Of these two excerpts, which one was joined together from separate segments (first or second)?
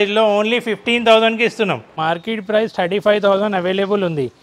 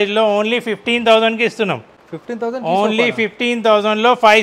first